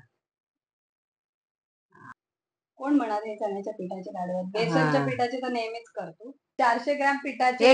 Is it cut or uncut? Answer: cut